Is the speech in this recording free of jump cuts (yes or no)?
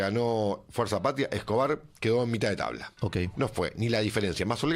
no